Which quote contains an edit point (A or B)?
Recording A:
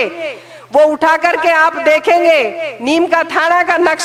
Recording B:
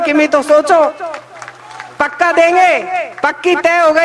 B